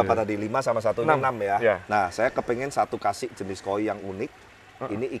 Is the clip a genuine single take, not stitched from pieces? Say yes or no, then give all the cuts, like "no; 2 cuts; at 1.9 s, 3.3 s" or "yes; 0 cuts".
yes; 0 cuts